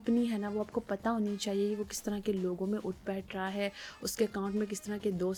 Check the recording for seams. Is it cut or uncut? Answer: uncut